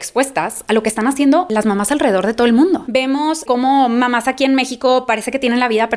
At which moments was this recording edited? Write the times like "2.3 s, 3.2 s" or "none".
1.5 s, 2.8 s